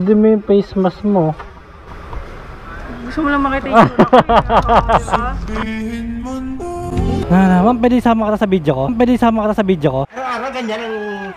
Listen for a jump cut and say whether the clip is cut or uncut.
cut